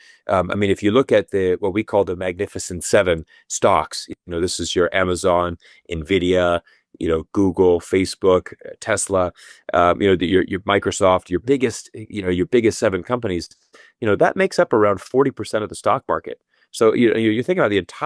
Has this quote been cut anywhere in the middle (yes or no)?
no